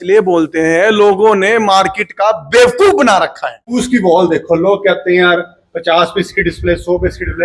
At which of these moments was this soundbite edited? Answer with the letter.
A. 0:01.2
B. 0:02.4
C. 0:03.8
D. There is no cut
C